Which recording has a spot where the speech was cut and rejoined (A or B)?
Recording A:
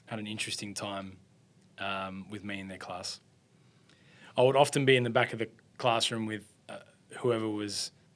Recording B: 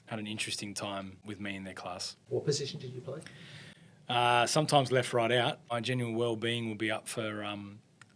B